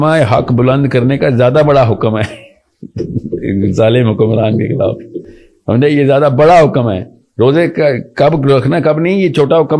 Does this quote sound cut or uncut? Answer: uncut